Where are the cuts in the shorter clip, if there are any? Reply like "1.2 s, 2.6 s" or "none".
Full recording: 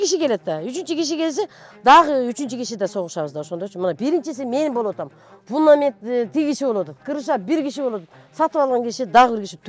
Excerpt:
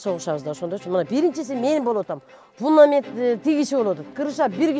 none